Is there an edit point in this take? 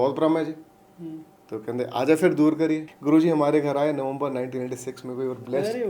yes; 1 cut; at 2.9 s

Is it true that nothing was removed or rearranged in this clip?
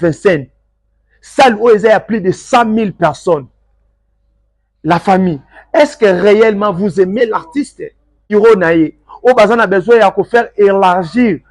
no; 1 cut; at 8.3 s

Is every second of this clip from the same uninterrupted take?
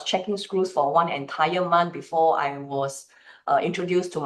yes; 0 cuts

